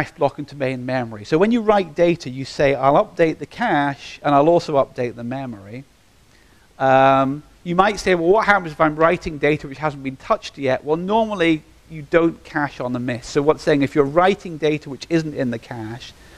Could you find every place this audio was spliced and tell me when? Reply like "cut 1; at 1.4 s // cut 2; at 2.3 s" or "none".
cut 1; at 3.1 s